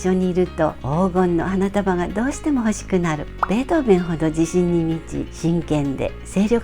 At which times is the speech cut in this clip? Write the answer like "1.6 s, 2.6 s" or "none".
none